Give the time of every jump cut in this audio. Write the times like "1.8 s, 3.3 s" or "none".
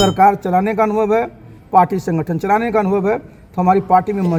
none